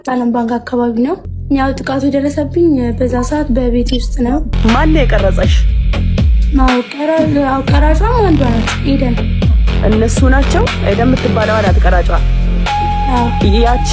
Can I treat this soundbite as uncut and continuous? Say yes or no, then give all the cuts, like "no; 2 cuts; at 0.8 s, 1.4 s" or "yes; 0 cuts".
no; 2 cuts; at 1.3 s, 4.6 s